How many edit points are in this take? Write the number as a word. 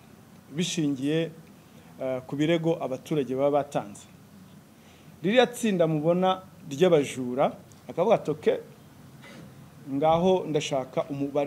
one